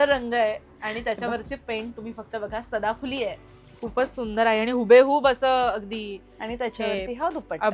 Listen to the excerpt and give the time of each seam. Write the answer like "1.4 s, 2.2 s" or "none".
3.7 s